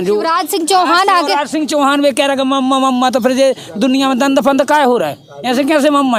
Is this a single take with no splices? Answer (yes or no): yes